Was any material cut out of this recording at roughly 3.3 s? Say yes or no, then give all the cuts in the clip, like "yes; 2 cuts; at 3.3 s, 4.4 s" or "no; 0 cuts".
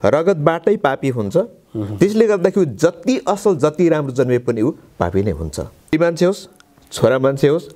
no; 1 cut; at 5.9 s